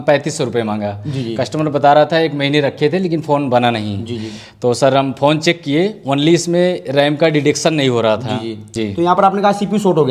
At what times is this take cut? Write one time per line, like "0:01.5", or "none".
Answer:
0:08.7